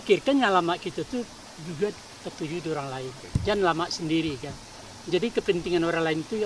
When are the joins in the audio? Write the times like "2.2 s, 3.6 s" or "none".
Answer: 3.1 s